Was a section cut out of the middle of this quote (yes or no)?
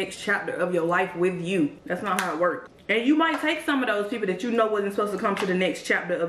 yes